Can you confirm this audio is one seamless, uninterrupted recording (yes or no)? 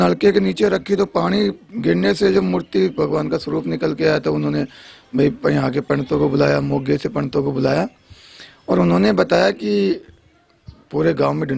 yes